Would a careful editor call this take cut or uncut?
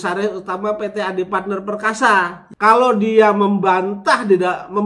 cut